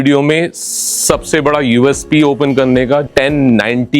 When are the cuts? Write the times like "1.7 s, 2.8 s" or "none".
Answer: 3.1 s